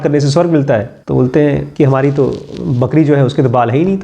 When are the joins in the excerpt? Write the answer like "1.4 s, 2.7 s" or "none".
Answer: 1.0 s, 1.7 s